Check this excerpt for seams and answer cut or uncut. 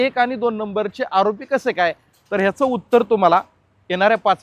uncut